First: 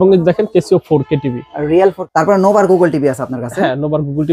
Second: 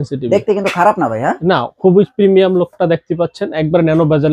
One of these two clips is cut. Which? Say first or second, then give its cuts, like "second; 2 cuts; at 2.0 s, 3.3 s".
first; 1 cut; at 2.0 s